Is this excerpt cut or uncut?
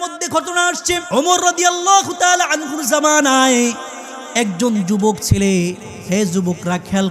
cut